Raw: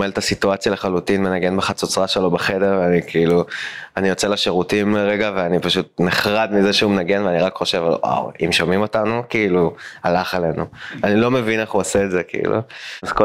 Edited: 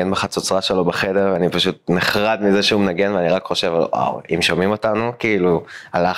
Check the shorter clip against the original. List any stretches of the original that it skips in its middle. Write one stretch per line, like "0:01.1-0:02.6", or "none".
0:02.8-0:05.5